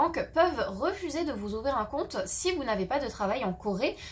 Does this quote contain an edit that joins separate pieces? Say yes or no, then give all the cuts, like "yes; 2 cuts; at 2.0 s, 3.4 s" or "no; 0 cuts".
no; 0 cuts